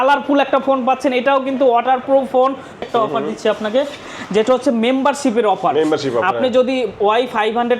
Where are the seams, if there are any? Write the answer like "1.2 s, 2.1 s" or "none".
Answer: 2.8 s